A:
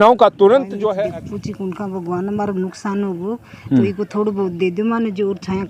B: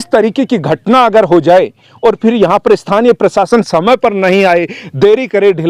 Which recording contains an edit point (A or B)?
A